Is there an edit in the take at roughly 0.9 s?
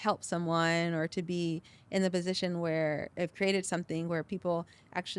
no; 1 cut; at 3.1 s

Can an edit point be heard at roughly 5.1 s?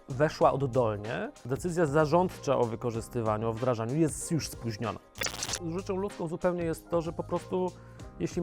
yes; 2 cuts; at 1.5 s, 5.1 s

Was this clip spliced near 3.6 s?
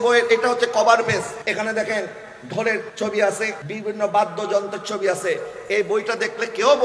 yes; 3 cuts; at 1.3 s, 2.9 s, 3.6 s

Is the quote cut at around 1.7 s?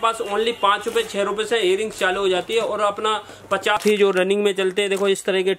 no; 1 cut; at 3.8 s

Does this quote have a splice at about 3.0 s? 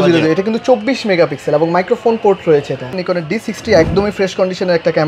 yes; 1 cut; at 3.0 s

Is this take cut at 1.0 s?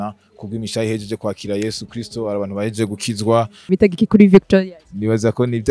no; 1 cut; at 3.7 s

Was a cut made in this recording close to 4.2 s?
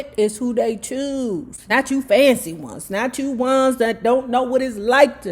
no; 1 cut; at 1.5 s

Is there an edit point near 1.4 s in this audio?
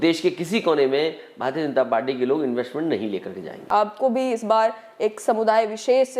no; 1 cut; at 3.6 s

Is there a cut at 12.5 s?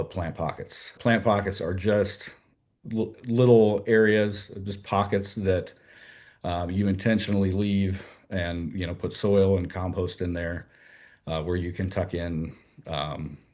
no; 1 cut; at 1.0 s

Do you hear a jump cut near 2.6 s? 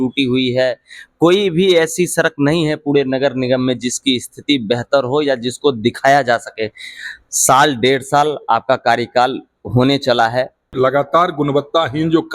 no; 1 cut; at 10.7 s

